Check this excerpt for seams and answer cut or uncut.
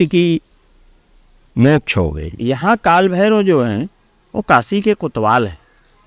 cut